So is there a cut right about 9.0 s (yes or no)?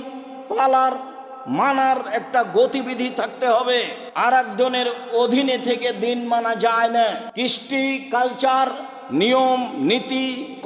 no